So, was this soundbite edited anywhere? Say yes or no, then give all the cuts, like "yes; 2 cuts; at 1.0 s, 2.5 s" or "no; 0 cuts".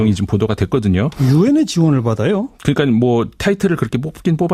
no; 0 cuts